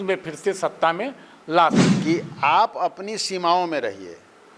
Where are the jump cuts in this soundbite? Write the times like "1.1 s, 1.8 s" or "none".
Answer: 1.9 s